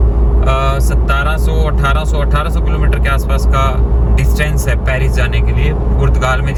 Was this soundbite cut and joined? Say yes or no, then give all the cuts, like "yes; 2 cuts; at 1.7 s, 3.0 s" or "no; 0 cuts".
no; 0 cuts